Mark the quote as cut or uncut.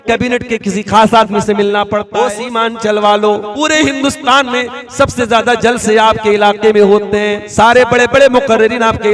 cut